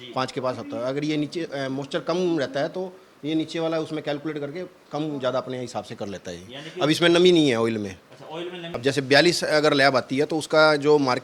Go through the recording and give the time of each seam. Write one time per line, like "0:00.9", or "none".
0:08.6